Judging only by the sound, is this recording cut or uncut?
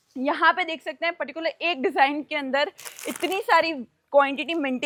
uncut